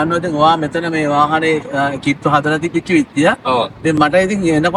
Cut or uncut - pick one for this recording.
uncut